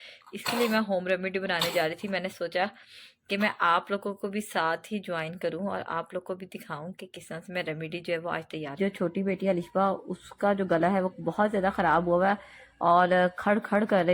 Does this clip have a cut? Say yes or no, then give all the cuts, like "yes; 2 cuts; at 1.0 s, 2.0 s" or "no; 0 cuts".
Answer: yes; 1 cut; at 8.8 s